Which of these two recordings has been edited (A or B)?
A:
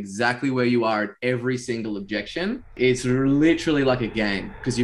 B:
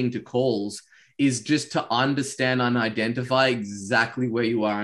A